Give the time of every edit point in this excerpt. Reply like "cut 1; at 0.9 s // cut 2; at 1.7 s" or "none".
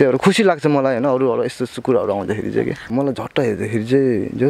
cut 1; at 2.9 s